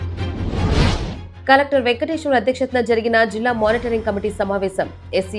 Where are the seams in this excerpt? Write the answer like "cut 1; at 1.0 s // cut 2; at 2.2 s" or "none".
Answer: cut 1; at 1.2 s